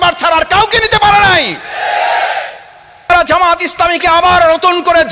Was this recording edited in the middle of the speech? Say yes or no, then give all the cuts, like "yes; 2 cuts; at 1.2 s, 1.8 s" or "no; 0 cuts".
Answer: yes; 1 cut; at 3.1 s